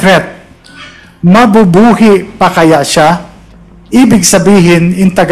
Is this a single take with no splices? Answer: yes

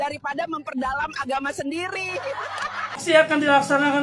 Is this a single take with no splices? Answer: no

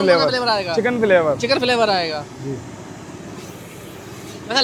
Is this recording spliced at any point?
no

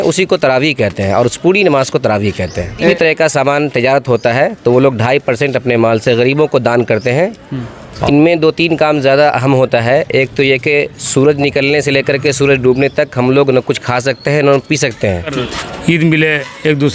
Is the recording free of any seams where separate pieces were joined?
no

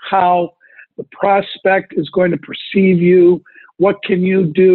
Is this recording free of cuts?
yes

